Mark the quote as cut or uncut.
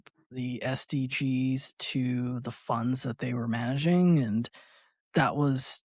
uncut